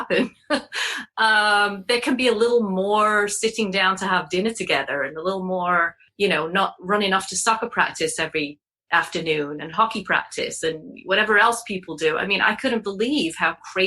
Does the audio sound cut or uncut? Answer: cut